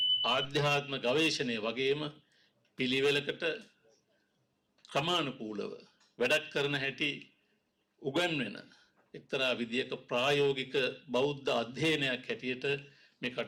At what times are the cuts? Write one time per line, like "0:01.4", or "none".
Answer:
none